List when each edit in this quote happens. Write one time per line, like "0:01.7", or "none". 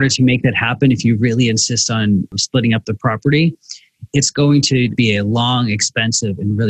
0:02.4
0:04.9